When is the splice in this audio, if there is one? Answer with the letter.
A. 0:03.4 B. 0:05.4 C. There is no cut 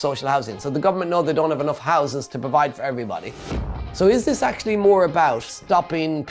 A